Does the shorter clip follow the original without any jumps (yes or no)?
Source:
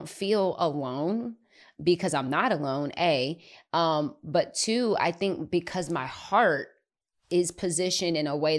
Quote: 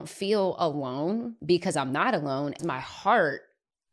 no